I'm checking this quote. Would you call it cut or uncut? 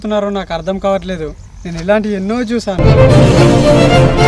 uncut